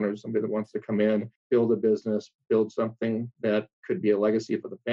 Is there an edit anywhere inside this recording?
yes; 2 cuts; at 1.4 s, 3.8 s

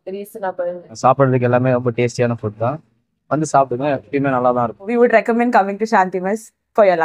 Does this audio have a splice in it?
yes; 2 cuts; at 0.9 s, 4.9 s

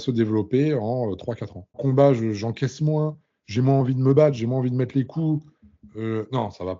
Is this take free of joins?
no; 1 cut; at 1.8 s

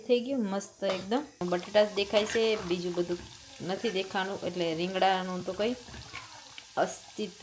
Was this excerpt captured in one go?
no; 1 cut; at 1.4 s

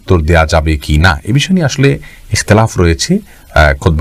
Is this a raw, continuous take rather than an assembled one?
yes; 0 cuts

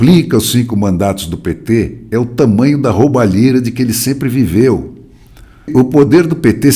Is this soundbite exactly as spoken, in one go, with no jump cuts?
no; 1 cut; at 5.7 s

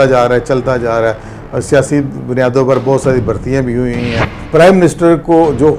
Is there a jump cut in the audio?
yes; 1 cut; at 4.3 s

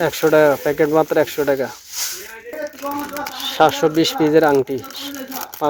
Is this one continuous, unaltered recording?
yes; 0 cuts

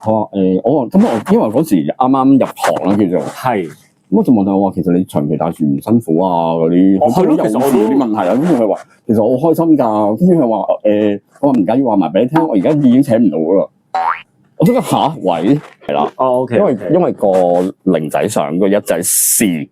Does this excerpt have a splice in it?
yes; 1 cut; at 15.8 s

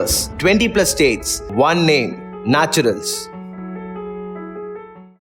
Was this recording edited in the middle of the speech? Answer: no; 0 cuts

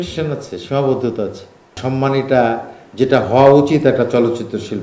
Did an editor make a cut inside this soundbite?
yes; 1 cut; at 1.8 s

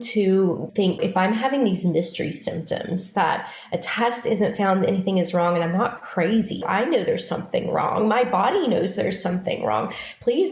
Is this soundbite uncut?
no; 2 cuts; at 1.0 s, 6.6 s

